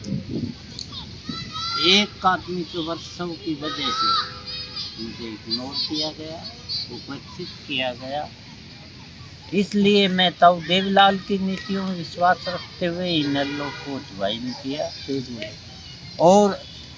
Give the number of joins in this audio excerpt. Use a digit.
0